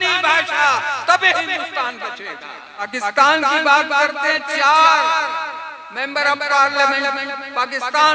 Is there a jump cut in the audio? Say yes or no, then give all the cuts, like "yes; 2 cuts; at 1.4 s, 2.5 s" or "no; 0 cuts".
yes; 1 cut; at 2.9 s